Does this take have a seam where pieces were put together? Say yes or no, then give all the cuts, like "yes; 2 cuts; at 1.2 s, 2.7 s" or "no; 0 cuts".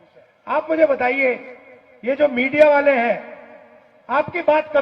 no; 0 cuts